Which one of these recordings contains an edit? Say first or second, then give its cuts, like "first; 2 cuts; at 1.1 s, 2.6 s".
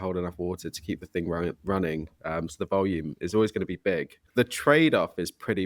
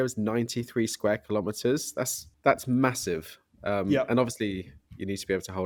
first; 1 cut; at 4.2 s